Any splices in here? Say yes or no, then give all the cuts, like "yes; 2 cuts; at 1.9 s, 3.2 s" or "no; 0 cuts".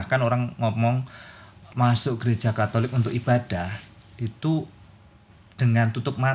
no; 0 cuts